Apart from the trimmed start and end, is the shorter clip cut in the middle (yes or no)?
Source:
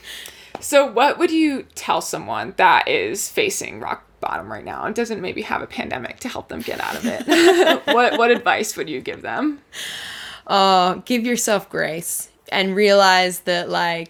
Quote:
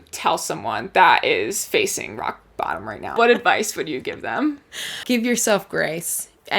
yes